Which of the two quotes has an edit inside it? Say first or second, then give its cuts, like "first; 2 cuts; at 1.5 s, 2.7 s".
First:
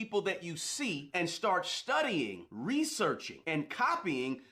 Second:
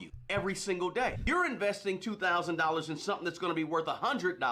second; 1 cut; at 1.2 s